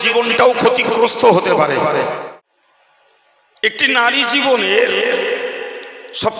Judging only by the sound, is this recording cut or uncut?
cut